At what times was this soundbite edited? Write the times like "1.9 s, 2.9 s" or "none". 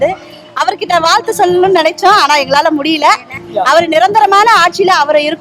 3.4 s